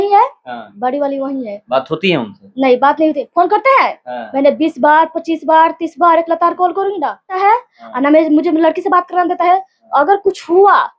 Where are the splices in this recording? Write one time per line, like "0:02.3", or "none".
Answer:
0:07.4